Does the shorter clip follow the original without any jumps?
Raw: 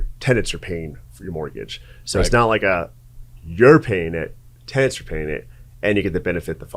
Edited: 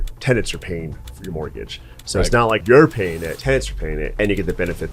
no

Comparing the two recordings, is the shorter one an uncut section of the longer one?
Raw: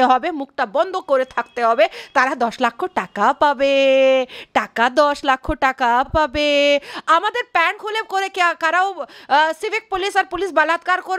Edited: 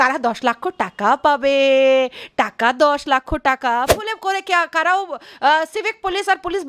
no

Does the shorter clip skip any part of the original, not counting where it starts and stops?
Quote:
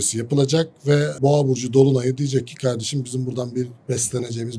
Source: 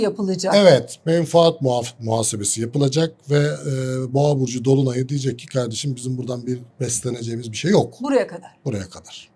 yes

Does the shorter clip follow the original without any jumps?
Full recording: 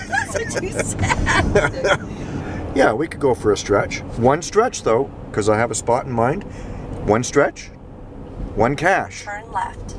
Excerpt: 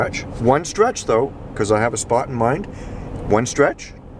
yes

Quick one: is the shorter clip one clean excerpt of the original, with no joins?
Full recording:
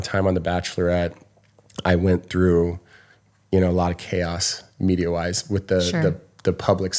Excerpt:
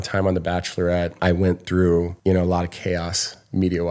no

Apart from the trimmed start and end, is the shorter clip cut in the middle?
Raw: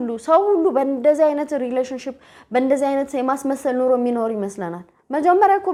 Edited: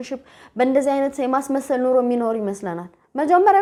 no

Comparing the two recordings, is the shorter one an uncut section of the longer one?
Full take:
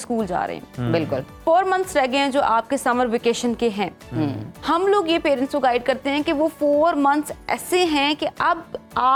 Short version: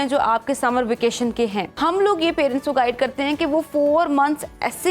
no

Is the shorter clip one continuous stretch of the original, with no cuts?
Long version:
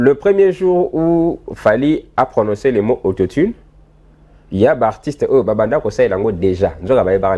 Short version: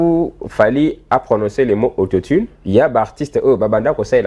no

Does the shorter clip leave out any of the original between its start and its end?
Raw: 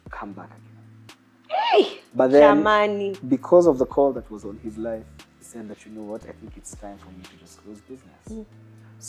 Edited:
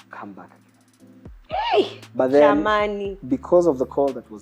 no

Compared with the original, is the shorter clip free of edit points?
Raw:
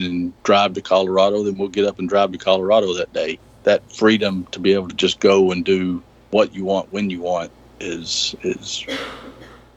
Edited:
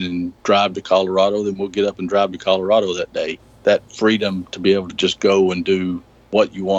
yes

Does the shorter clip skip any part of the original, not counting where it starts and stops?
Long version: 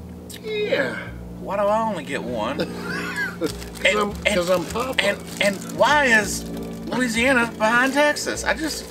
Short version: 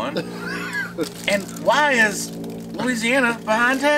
yes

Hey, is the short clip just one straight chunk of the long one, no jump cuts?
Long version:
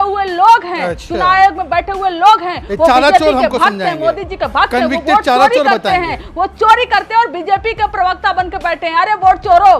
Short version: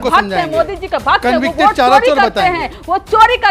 yes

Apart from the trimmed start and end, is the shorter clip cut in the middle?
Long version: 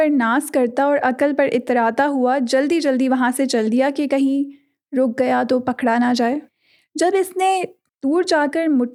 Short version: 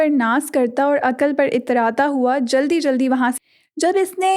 yes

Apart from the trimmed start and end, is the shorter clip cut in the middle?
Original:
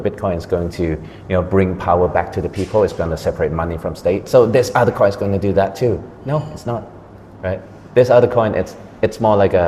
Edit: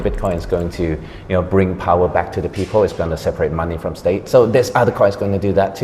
no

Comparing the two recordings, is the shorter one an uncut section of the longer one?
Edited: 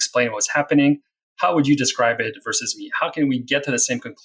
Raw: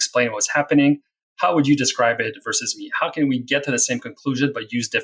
yes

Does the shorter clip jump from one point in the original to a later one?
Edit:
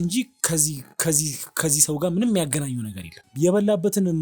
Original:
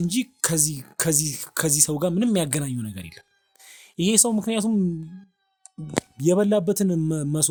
yes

